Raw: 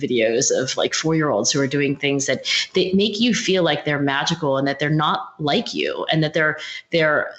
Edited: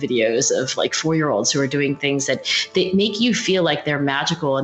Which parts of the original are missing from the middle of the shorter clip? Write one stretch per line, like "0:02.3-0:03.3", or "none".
none